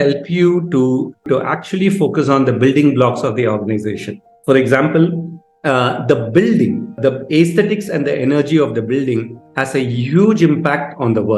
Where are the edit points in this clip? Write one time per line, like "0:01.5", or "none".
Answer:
0:01.2